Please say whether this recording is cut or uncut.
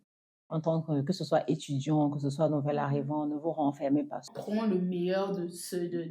cut